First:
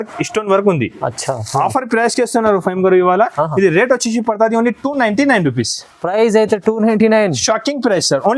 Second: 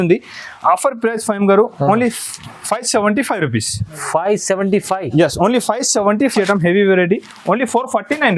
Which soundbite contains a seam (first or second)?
second